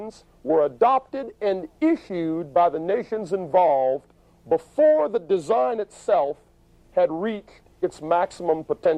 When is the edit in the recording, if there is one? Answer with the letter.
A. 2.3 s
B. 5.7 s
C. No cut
A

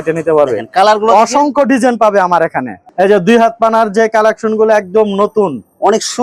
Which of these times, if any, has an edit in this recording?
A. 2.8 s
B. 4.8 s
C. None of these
A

